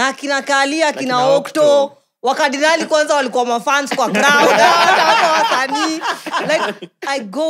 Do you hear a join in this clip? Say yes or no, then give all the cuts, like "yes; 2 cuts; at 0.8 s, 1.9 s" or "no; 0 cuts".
no; 0 cuts